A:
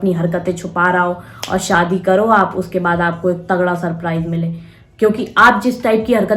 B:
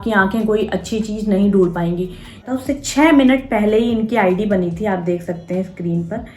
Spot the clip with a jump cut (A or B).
B